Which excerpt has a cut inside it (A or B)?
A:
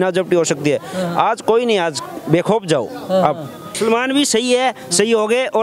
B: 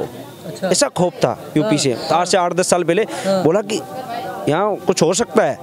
A